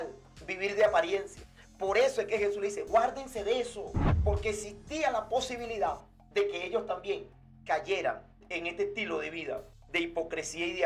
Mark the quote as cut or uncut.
cut